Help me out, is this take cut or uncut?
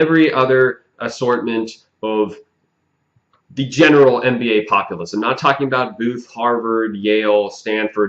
cut